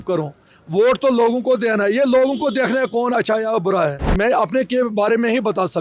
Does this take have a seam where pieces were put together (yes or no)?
yes